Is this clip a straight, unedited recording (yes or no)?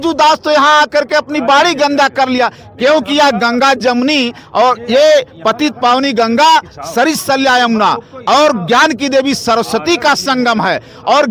yes